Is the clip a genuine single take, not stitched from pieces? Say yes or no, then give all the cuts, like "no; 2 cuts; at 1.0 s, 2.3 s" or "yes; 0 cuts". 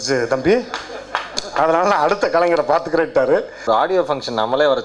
no; 1 cut; at 3.6 s